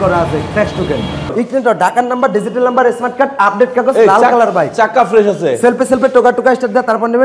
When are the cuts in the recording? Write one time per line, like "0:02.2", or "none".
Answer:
0:01.3

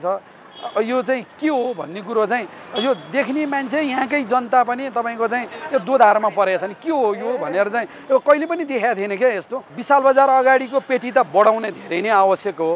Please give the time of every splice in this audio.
0:09.7

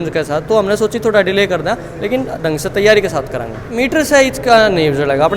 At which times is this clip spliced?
0:03.7

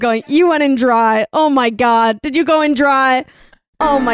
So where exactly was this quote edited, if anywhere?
none

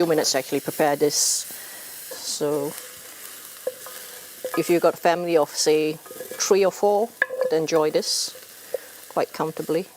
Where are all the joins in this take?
0:02.0

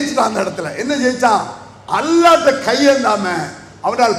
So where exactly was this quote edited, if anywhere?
none

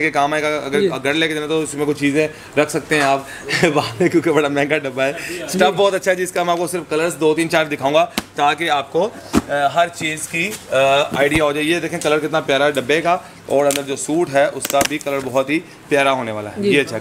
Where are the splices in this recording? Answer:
none

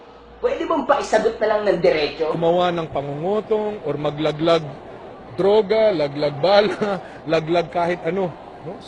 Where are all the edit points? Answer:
none

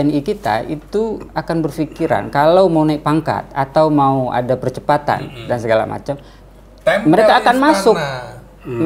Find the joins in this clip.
none

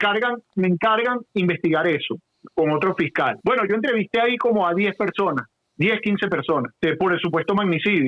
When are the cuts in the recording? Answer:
0:03.4
0:06.7

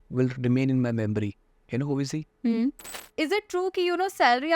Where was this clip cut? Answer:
0:03.0

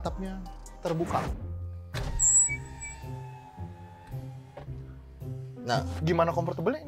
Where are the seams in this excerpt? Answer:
0:01.3

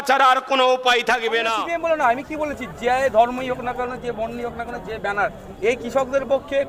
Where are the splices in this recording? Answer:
0:01.6

